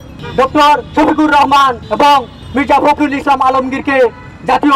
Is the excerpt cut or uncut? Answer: cut